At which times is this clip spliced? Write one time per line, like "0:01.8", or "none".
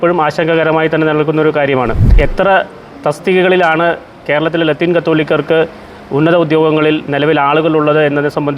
0:02.1